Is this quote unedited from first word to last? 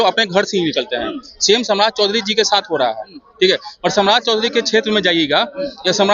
yes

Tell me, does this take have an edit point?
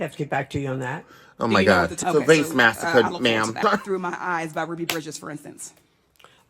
yes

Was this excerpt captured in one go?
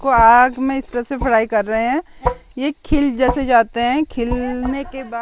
yes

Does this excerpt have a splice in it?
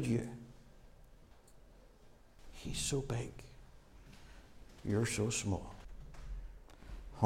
yes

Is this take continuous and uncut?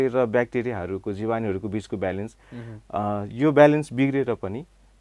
yes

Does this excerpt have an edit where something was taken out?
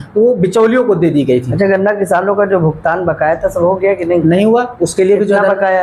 no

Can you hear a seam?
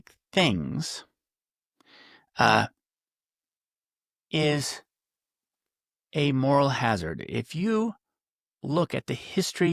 no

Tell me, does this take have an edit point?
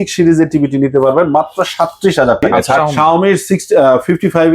yes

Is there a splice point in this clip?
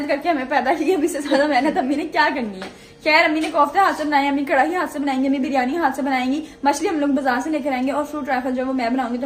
no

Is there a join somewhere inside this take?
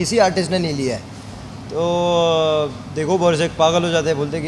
no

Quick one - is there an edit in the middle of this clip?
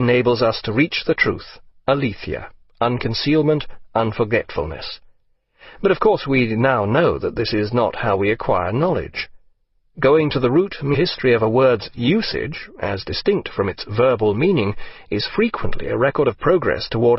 no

